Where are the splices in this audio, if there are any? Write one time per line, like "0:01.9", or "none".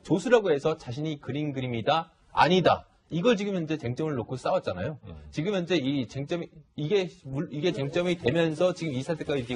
0:01.9